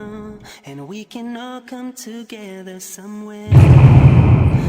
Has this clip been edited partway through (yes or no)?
yes